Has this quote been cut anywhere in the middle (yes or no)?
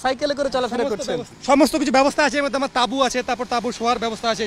yes